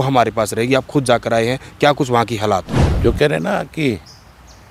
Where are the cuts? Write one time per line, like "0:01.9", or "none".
0:02.8